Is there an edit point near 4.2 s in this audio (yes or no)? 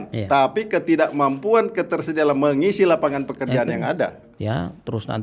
yes